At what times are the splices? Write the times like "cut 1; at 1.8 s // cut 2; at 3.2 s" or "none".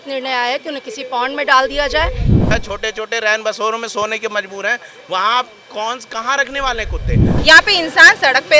cut 1; at 2.5 s // cut 2; at 7.3 s